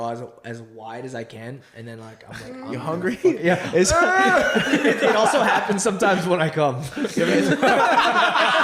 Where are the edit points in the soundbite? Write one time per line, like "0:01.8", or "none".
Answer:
none